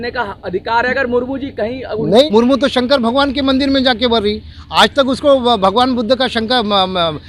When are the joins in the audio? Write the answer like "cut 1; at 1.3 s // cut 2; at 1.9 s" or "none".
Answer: cut 1; at 2.2 s